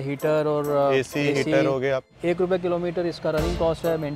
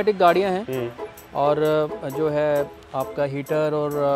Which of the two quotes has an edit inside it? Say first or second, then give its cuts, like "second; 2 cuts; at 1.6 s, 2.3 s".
first; 1 cut; at 2.1 s